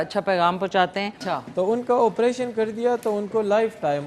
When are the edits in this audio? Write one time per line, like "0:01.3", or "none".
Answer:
0:01.2